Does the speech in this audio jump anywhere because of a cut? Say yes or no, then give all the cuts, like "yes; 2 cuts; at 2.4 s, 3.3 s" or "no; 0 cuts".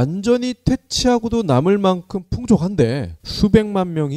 no; 0 cuts